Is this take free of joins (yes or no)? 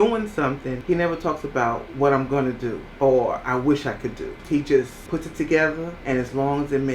no